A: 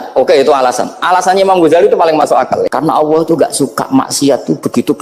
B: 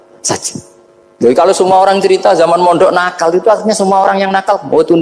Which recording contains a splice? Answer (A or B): A